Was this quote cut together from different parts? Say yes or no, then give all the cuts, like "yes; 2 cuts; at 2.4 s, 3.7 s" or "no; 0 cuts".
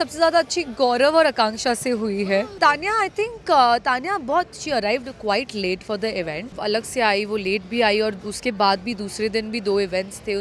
yes; 2 cuts; at 2.6 s, 6.6 s